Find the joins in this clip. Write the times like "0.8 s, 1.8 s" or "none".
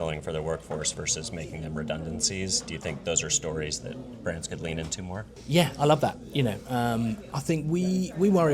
5.2 s